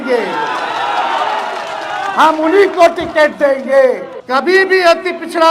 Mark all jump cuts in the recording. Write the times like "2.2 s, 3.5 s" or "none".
4.1 s